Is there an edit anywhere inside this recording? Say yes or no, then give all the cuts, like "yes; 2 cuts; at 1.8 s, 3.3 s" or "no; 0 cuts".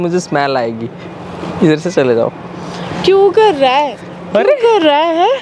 no; 0 cuts